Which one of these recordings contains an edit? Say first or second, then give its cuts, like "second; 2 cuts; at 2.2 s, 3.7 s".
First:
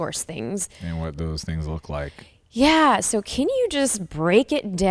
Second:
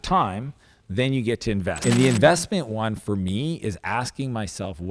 second; 1 cut; at 1.8 s